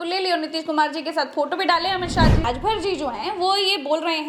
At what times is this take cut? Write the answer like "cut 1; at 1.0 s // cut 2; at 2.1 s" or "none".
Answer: cut 1; at 2.5 s